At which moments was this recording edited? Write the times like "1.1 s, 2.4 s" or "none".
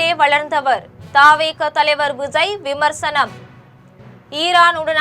3.4 s